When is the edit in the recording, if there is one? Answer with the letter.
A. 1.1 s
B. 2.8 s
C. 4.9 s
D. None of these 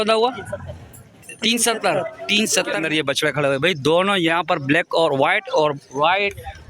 B